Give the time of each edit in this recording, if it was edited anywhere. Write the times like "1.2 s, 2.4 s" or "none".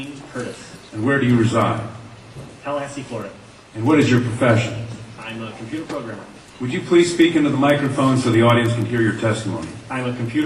4.8 s